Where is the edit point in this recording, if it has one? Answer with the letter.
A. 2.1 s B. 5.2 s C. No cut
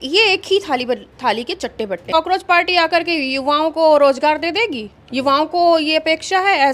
A